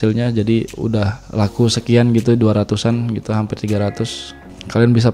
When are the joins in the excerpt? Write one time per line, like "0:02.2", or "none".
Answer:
0:00.9